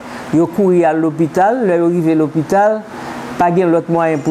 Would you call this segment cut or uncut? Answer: uncut